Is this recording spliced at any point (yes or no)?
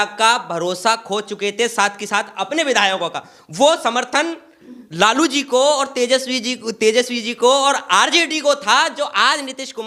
no